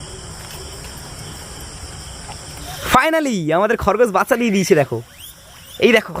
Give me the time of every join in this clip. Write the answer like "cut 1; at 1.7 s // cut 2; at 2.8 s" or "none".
cut 1; at 2.7 s